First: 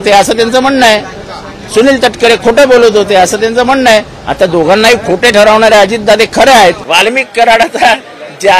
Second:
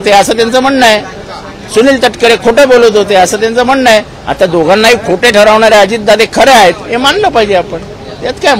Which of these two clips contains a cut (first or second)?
first